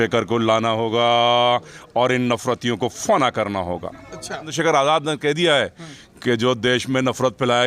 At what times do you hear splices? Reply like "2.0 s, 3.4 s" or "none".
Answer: 4.5 s